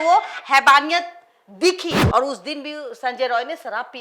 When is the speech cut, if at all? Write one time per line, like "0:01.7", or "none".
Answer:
0:02.0